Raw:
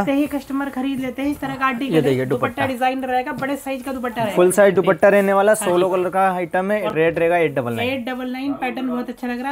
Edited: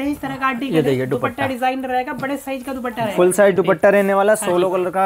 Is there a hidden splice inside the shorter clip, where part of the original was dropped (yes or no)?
no